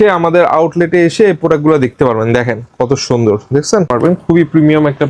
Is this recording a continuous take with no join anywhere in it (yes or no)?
no